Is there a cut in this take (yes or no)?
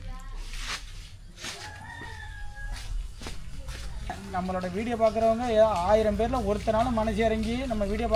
yes